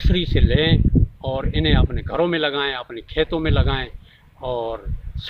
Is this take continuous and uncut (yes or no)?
yes